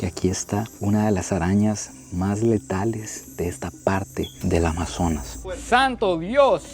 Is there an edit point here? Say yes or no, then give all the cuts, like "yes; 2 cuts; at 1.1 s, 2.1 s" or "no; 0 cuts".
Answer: yes; 1 cut; at 5.4 s